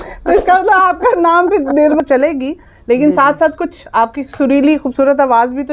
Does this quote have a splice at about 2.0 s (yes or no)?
yes